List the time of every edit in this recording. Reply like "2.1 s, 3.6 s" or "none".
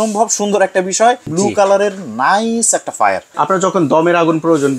1.3 s, 3.3 s